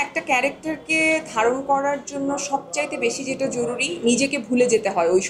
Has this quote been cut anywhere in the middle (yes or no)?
no